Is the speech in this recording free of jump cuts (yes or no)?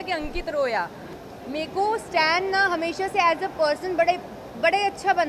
no